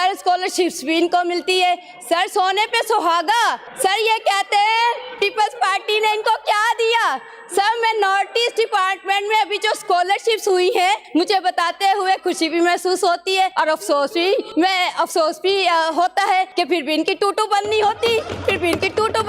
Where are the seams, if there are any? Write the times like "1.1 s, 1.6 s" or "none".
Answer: 3.7 s, 11.0 s, 13.5 s, 14.5 s, 16.5 s